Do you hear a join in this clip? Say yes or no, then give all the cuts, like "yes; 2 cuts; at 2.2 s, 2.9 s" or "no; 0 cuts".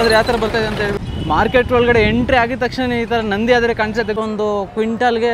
yes; 2 cuts; at 1.0 s, 4.2 s